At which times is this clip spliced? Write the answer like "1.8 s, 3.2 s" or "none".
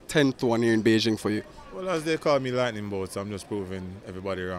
none